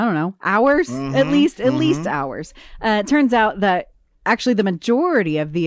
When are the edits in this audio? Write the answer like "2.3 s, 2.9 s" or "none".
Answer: none